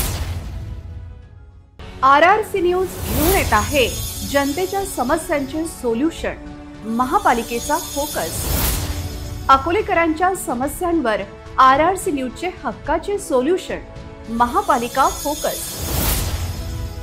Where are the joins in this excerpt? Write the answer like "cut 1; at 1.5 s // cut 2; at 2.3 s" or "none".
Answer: cut 1; at 1.1 s